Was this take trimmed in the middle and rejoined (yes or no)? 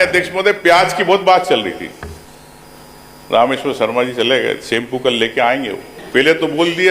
yes